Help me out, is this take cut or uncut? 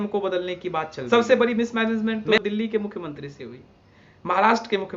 cut